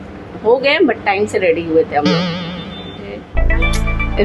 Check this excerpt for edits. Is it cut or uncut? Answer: cut